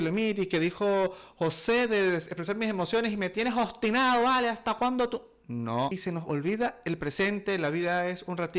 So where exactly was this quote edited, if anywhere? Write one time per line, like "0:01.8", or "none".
0:06.0